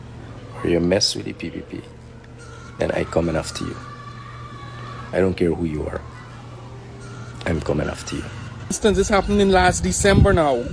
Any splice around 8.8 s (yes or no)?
yes